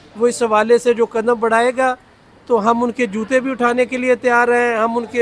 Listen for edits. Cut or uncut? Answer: uncut